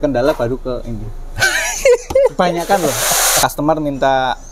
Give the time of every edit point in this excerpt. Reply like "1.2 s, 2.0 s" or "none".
3.3 s